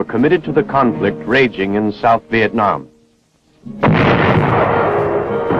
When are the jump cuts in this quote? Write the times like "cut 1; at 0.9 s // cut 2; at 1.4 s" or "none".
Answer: none